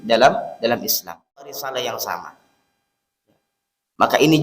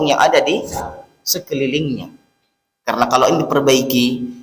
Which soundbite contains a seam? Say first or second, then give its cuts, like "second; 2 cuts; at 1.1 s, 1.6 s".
first; 1 cut; at 1.6 s